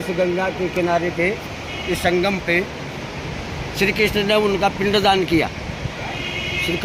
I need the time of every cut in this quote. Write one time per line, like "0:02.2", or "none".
none